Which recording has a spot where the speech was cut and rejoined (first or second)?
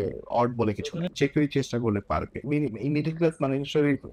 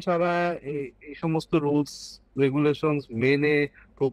first